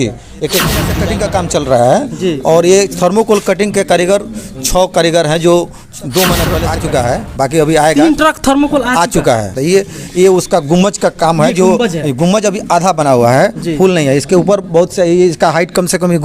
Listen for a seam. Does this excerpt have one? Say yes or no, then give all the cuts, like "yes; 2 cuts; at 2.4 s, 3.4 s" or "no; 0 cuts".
yes; 2 cuts; at 0.9 s, 6.7 s